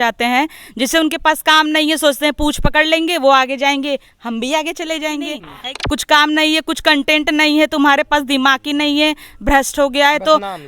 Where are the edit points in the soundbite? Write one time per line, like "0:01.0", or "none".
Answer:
0:05.5